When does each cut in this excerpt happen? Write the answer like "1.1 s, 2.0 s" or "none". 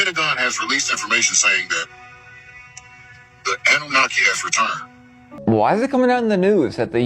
5.3 s